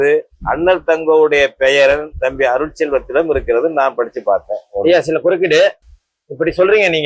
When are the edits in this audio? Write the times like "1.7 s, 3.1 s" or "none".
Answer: none